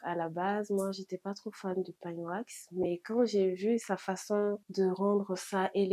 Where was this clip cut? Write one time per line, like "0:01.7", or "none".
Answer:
0:04.6